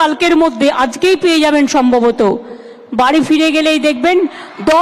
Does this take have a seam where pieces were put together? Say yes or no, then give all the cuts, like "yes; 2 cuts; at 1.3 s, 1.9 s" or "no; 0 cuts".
no; 0 cuts